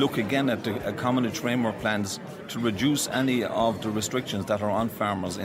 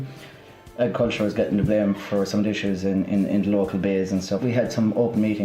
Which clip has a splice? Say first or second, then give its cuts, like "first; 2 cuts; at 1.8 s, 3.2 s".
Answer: second; 1 cut; at 4.4 s